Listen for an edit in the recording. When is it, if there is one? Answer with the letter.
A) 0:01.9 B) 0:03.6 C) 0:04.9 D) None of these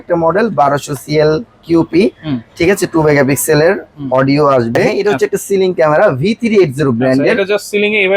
C